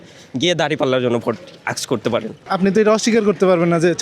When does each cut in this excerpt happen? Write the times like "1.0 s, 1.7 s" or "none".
2.4 s